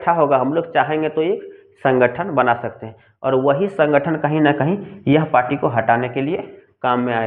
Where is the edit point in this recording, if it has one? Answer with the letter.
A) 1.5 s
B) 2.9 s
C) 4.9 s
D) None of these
D